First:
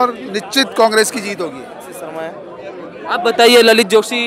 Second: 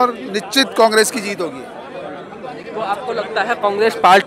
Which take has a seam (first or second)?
first